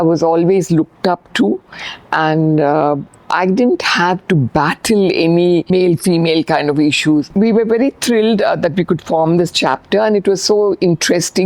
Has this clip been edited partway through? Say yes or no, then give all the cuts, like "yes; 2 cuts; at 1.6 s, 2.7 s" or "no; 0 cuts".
yes; 2 cuts; at 5.7 s, 7.3 s